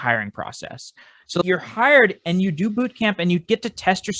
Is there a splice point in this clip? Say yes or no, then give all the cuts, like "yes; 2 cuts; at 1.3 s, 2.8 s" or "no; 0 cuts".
no; 0 cuts